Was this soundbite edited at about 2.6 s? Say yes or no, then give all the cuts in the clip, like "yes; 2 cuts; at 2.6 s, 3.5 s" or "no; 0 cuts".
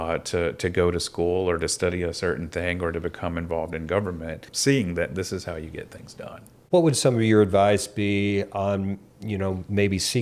no; 2 cuts; at 4.5 s, 6.5 s